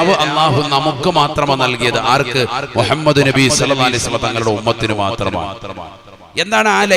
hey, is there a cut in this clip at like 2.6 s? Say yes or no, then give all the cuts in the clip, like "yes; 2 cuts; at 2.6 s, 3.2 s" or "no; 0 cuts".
no; 0 cuts